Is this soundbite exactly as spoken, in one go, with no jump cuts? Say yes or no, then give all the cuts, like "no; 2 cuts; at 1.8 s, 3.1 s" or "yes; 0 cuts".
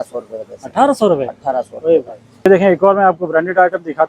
no; 1 cut; at 2.4 s